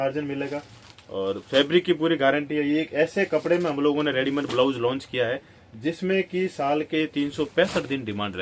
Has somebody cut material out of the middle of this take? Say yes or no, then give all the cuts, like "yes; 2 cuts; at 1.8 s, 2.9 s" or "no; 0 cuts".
no; 0 cuts